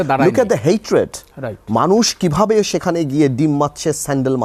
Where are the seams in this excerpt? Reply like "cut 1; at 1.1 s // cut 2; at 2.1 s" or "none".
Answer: none